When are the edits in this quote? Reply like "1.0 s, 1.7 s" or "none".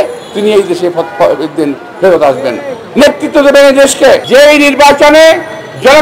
4.2 s